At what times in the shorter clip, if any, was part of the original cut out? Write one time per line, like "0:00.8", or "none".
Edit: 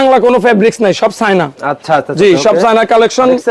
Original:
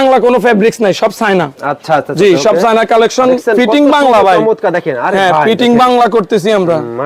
none